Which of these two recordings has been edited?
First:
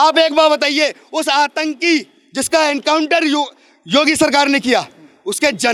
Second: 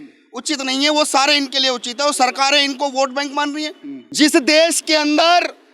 second; 1 cut; at 4.0 s

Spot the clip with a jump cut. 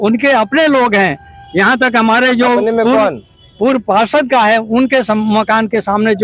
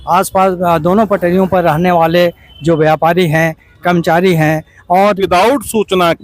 second; 1 cut; at 5.2 s

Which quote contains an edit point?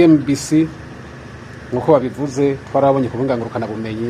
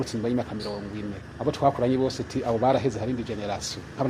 second; 1 cut; at 1.2 s

